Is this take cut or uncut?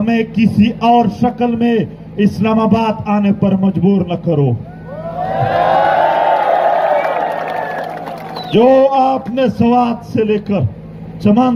uncut